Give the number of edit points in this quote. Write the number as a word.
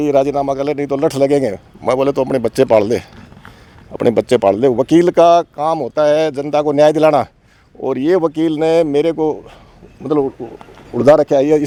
zero